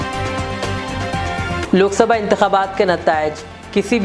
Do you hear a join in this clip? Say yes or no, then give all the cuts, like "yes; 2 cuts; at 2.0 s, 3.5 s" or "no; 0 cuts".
no; 0 cuts